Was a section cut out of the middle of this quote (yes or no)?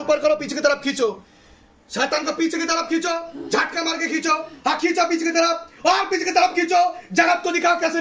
no